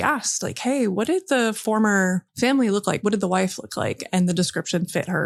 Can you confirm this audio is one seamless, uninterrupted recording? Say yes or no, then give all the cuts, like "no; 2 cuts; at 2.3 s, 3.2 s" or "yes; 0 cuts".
yes; 0 cuts